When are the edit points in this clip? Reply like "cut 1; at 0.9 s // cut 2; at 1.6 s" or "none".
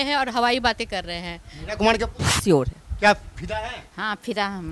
cut 1; at 2.3 s